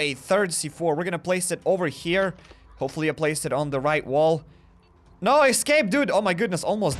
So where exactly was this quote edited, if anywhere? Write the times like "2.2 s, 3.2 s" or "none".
none